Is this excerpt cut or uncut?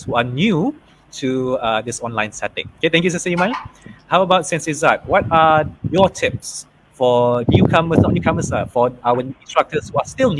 uncut